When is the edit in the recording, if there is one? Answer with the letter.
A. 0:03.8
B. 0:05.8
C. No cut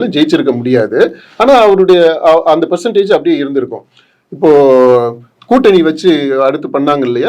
C